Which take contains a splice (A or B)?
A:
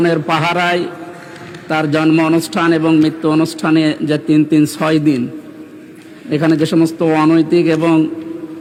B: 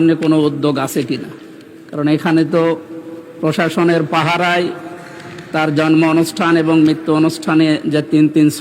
B